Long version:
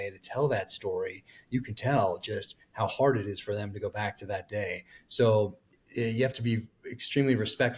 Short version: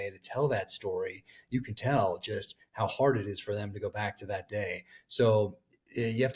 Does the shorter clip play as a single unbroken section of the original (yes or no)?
yes